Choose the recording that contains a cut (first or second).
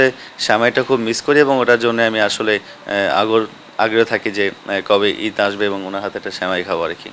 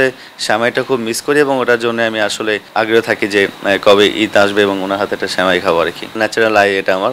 second